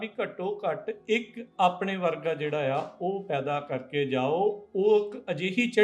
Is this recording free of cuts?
yes; 0 cuts

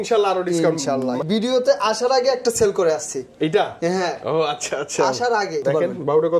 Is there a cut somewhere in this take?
yes; 2 cuts; at 1.2 s, 5.6 s

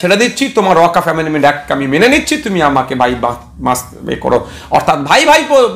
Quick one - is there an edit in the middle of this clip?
no; 0 cuts

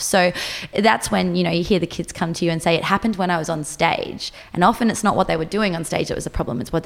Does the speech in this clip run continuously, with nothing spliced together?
yes; 0 cuts

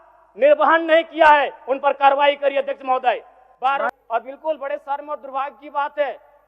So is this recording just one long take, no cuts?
no; 1 cut; at 3.9 s

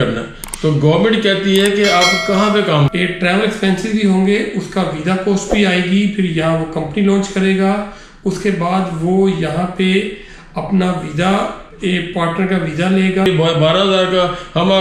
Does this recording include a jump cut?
yes; 2 cuts; at 2.9 s, 13.3 s

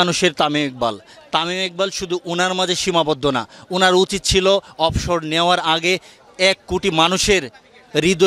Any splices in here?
no; 0 cuts

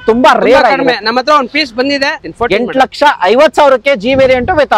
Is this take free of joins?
no; 1 cut; at 2.2 s

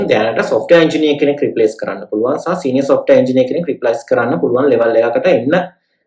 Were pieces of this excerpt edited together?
no; 0 cuts

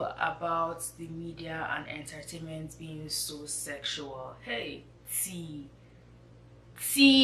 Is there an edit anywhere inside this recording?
no; 0 cuts

